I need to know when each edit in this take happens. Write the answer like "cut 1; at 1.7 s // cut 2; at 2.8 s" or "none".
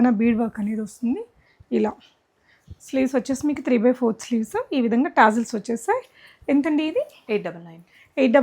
none